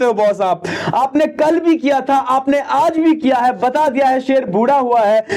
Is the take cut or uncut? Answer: uncut